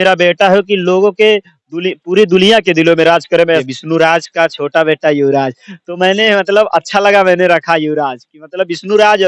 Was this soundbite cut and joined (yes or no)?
yes